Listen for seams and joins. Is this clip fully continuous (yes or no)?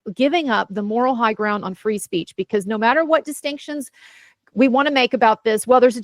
yes